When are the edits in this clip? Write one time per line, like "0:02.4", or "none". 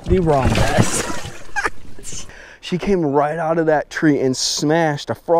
0:02.3